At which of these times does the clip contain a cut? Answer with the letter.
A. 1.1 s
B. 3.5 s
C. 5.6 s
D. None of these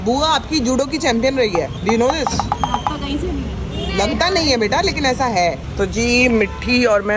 D